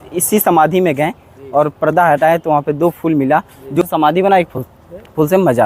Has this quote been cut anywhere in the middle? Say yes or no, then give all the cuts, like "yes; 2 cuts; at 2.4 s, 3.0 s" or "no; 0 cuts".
yes; 1 cut; at 3.8 s